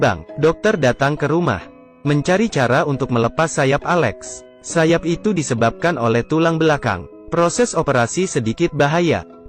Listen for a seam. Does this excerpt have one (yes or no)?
no